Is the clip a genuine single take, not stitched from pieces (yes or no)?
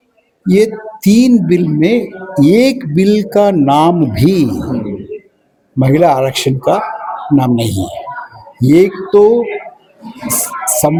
yes